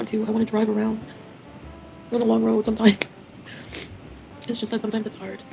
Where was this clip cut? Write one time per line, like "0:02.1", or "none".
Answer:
0:04.1